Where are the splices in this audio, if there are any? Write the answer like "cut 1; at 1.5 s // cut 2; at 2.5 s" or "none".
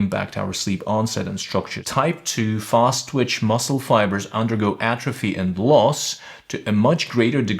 cut 1; at 1.8 s